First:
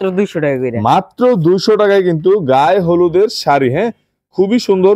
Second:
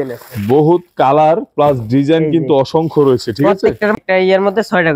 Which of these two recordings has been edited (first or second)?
second